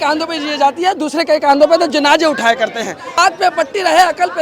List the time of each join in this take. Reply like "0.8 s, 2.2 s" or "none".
3.2 s